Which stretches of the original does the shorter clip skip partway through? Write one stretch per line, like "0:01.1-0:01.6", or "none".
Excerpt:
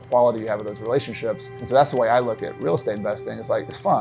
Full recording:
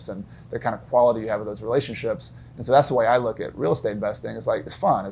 0:02.3-0:02.5